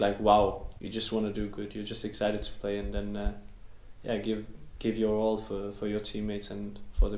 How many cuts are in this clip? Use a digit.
0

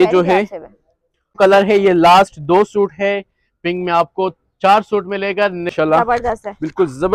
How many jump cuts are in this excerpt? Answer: 2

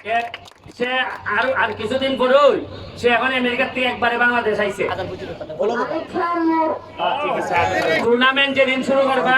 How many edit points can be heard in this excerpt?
2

